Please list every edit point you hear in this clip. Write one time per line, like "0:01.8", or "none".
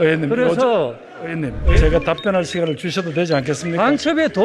0:01.6